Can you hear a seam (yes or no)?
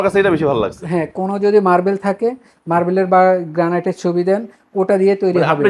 no